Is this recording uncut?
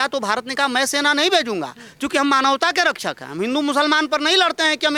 yes; 0 cuts

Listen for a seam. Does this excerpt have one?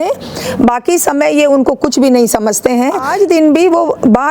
yes; 1 cut; at 3.0 s

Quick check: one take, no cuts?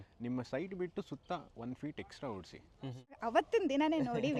no; 1 cut; at 3.2 s

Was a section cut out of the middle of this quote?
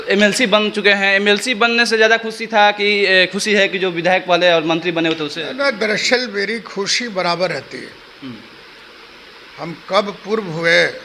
no; 0 cuts

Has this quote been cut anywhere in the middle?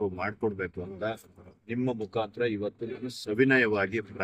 no; 0 cuts

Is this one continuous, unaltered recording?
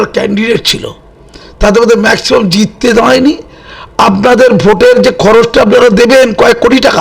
yes; 0 cuts

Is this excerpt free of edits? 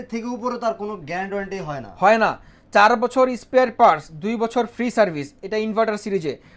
yes; 0 cuts

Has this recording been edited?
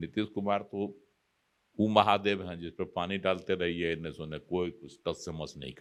no; 0 cuts

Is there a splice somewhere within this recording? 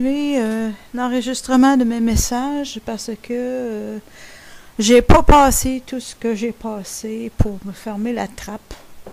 no; 0 cuts

